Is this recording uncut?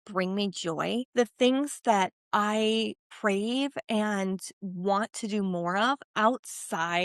no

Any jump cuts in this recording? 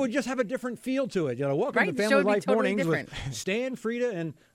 no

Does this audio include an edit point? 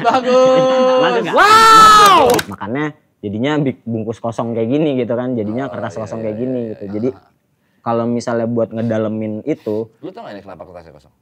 yes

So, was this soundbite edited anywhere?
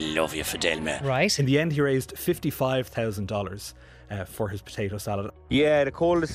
yes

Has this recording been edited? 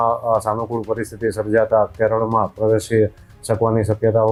no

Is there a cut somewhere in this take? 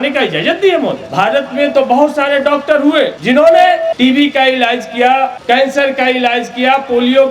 yes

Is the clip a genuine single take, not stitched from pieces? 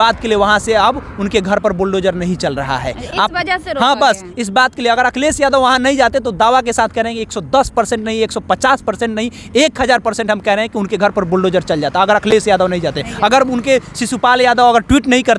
yes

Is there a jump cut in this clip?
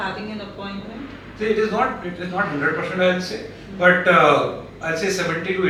no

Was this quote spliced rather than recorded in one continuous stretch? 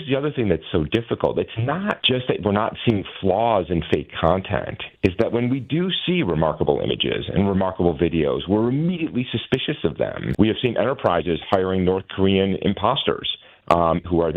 yes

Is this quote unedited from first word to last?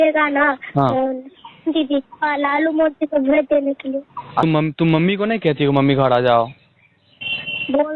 no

